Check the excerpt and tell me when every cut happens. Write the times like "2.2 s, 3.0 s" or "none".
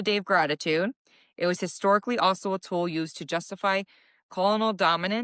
none

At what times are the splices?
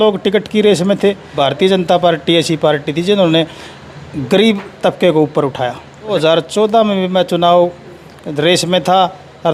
1.3 s, 6.1 s

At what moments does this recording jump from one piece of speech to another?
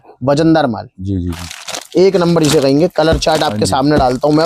none

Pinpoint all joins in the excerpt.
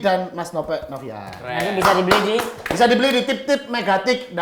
none

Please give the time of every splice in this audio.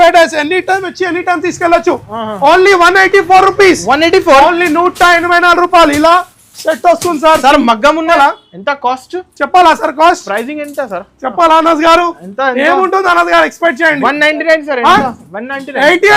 8.1 s

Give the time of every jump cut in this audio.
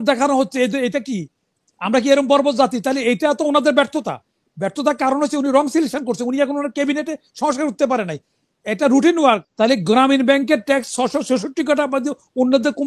9.5 s

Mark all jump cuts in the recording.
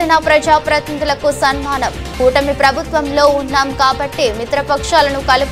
none

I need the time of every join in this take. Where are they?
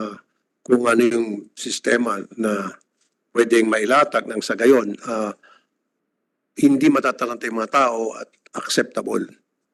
none

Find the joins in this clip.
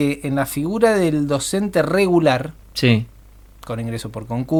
none

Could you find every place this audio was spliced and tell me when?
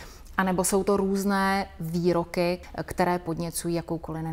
2.6 s

